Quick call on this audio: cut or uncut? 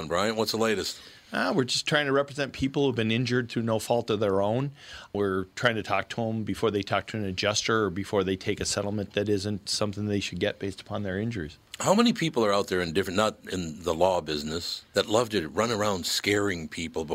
uncut